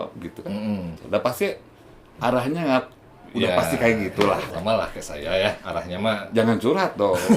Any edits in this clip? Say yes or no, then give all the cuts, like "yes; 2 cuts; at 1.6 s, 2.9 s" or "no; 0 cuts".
yes; 2 cuts; at 0.9 s, 4.6 s